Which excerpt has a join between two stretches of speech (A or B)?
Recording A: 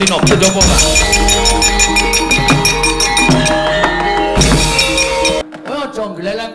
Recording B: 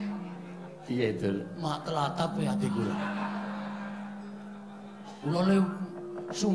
A